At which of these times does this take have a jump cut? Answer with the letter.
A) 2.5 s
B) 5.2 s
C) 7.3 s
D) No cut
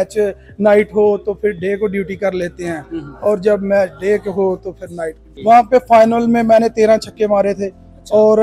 B